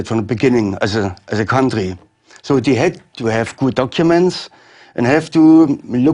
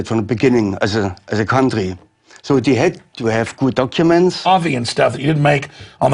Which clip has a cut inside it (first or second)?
first